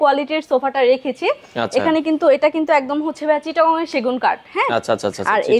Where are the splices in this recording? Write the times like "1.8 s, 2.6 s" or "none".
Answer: none